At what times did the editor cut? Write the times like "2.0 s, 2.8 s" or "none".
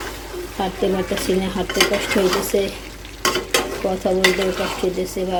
none